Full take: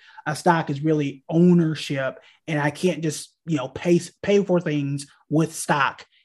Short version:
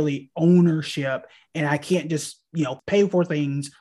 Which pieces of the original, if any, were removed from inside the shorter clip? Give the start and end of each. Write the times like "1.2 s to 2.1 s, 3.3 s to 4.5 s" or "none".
3.7 s to 4.1 s